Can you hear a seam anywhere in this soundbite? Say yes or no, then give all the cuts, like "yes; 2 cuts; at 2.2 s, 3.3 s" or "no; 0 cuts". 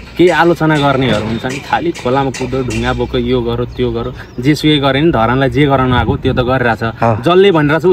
no; 0 cuts